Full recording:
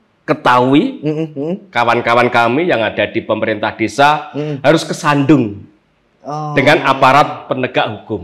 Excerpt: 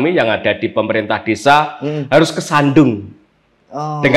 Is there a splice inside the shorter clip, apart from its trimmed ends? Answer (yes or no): no